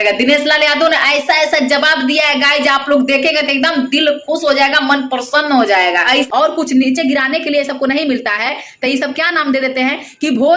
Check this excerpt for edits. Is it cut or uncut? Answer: cut